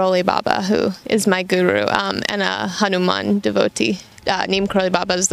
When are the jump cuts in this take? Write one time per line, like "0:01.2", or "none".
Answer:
0:04.1